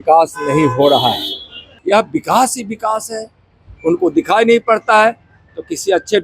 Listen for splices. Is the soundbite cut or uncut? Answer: cut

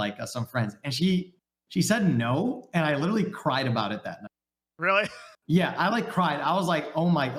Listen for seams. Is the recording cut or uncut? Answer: uncut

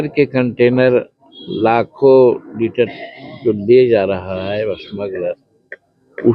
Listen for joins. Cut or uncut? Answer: uncut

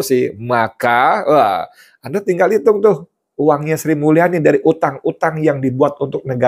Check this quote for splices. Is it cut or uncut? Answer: uncut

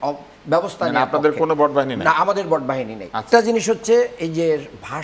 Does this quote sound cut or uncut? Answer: cut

